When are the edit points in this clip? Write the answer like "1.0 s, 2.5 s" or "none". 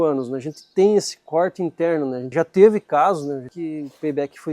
2.2 s, 3.5 s